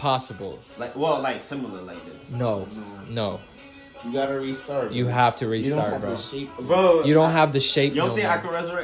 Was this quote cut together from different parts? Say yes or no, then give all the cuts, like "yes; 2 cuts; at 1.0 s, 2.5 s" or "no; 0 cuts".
no; 0 cuts